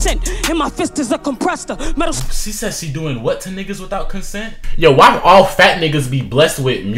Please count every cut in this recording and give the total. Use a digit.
1